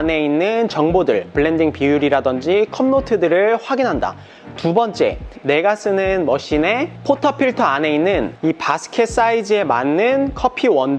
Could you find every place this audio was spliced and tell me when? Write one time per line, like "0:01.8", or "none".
none